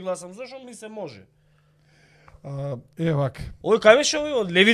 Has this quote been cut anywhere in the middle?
no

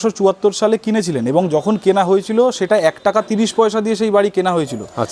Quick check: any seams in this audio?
no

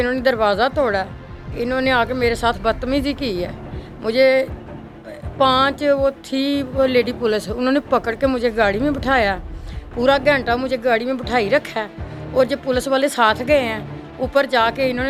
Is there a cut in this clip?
no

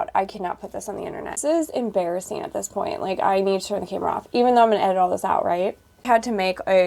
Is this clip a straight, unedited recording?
no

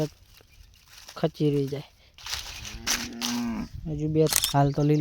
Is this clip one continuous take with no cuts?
no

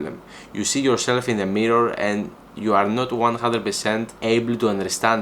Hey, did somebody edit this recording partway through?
yes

